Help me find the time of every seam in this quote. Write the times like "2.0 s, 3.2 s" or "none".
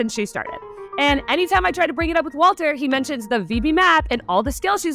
none